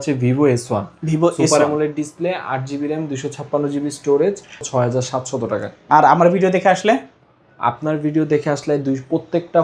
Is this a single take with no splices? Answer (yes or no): no